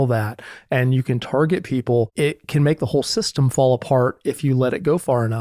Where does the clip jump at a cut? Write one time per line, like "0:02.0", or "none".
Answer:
0:02.1